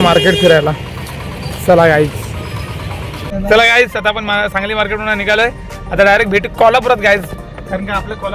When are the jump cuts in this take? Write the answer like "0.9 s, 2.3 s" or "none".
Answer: 3.3 s